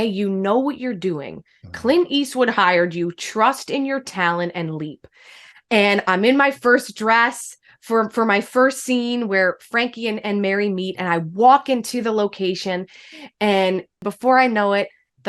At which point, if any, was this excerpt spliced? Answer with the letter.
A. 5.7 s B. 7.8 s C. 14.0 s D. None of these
C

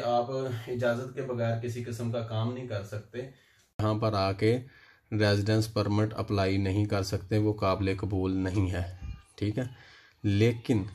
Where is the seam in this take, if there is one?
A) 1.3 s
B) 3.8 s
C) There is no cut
B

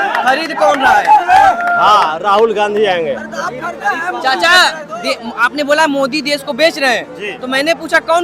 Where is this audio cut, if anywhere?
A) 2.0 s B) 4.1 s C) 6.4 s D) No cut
D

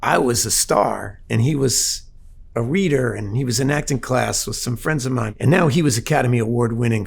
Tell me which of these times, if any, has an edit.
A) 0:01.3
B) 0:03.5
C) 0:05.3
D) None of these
C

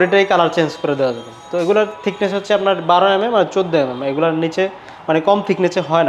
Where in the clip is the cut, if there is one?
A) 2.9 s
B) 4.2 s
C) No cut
C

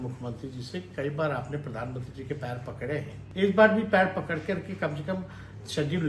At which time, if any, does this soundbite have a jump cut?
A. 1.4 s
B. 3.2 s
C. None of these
B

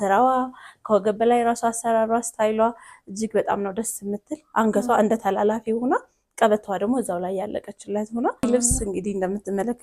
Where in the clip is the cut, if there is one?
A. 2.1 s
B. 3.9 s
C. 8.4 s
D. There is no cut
C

